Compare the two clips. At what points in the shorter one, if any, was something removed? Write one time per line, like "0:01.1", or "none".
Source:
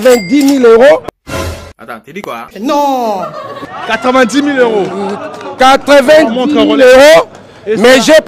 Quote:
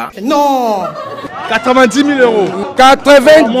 0:02.6